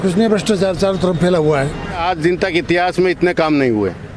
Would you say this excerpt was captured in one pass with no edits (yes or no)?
no